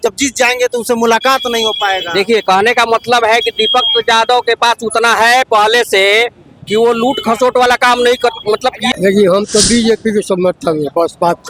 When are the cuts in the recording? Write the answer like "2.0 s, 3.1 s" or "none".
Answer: 8.8 s